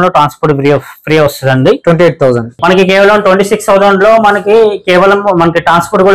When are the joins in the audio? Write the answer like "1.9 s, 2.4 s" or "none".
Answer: 2.6 s